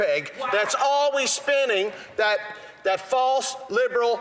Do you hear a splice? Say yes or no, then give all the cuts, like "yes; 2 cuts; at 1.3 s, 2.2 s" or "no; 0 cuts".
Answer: no; 0 cuts